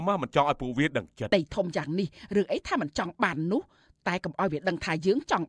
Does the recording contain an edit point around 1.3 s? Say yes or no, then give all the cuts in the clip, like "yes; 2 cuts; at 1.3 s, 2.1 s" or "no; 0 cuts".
yes; 1 cut; at 1.3 s